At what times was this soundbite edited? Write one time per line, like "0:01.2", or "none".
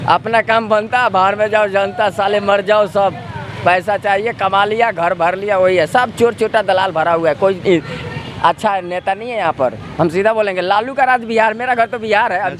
none